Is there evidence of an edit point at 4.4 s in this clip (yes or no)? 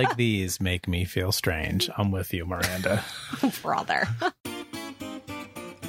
yes